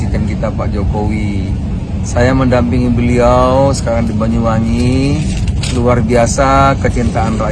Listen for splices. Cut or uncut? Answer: uncut